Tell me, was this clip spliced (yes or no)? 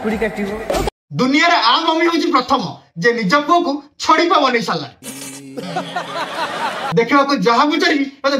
yes